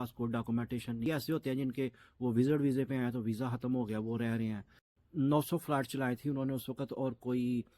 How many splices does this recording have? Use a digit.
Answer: 2